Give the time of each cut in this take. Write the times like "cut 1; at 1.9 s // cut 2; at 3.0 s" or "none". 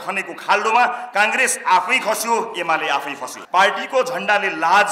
cut 1; at 3.3 s